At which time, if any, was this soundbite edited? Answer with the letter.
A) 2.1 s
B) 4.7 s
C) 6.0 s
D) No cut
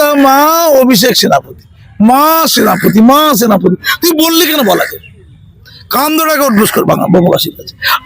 D